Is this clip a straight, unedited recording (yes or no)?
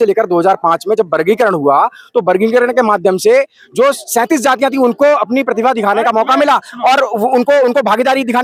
yes